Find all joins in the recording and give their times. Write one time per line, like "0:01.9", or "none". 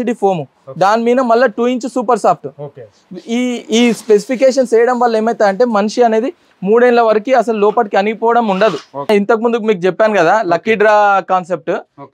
0:09.1